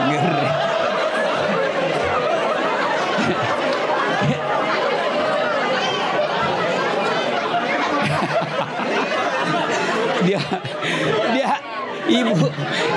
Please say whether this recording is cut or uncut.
uncut